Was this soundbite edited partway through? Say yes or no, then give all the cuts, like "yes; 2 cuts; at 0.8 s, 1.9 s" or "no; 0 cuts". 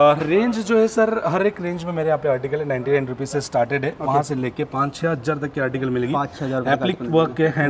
no; 0 cuts